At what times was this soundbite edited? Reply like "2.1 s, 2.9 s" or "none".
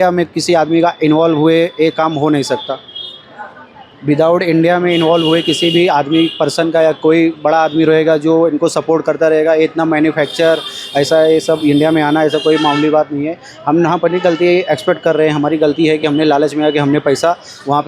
none